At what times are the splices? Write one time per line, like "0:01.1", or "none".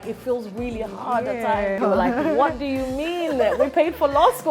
0:01.8